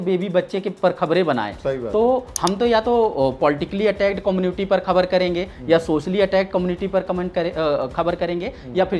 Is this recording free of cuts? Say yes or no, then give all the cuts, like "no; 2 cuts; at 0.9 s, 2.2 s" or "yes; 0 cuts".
yes; 0 cuts